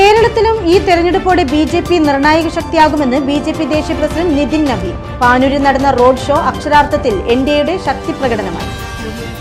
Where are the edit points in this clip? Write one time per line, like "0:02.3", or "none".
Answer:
none

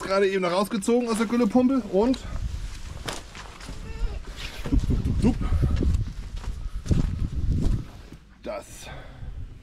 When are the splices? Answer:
none

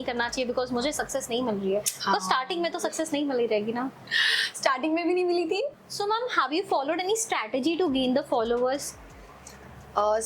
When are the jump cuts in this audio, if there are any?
0:05.7

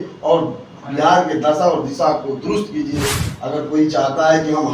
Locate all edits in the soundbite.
0:03.2

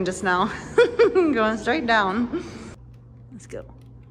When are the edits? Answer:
0:02.7

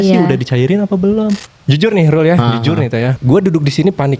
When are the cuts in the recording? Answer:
0:01.5
0:03.2

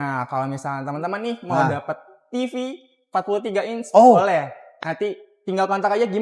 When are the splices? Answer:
none

